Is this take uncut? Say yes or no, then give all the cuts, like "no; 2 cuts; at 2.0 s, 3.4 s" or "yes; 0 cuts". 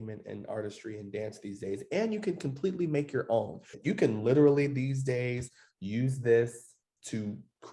no; 1 cut; at 3.7 s